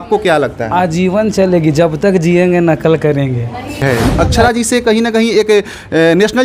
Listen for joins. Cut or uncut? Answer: cut